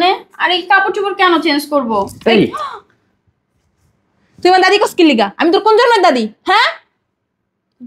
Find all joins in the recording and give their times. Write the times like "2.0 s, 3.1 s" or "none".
none